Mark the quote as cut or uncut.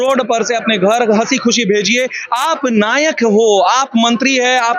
uncut